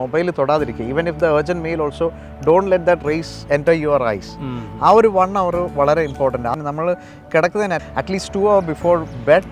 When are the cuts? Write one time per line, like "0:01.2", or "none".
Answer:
0:06.6
0:07.9